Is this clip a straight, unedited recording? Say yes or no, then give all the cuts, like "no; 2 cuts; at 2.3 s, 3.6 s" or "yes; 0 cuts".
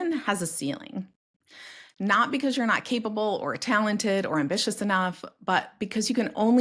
yes; 0 cuts